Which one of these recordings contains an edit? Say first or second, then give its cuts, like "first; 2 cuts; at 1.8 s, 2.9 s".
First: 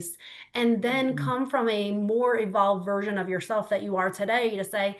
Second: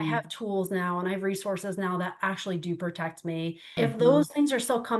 second; 1 cut; at 3.8 s